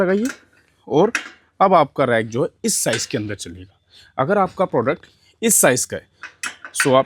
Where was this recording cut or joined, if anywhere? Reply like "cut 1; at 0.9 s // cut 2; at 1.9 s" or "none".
none